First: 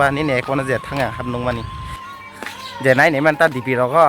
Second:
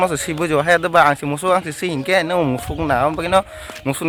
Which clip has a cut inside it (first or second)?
first